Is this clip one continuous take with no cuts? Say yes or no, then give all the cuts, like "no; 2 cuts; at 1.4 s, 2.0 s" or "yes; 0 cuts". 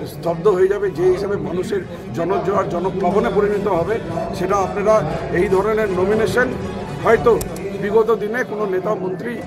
yes; 0 cuts